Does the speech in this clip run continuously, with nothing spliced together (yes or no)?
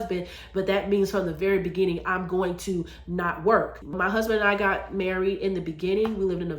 no